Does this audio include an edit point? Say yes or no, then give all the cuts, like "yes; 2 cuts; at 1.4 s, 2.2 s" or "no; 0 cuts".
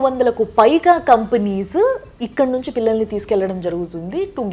no; 0 cuts